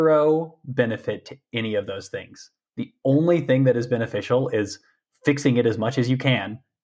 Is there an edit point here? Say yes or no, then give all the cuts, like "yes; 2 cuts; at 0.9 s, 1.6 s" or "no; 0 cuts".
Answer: no; 0 cuts